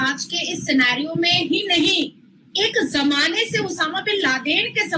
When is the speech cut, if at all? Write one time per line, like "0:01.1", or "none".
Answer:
none